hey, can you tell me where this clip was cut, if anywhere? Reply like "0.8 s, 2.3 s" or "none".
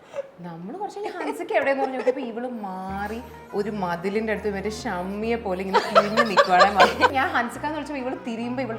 7.1 s